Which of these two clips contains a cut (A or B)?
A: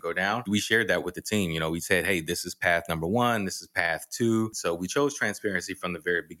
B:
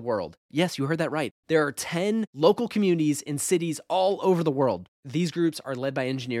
A